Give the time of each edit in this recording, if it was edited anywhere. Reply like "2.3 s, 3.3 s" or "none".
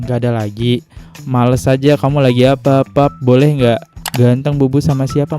4.0 s